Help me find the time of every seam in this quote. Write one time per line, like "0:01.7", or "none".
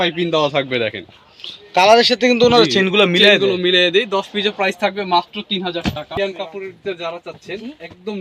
0:06.1